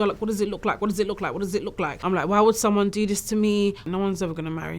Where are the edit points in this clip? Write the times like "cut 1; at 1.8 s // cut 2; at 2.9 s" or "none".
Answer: cut 1; at 2.0 s // cut 2; at 3.8 s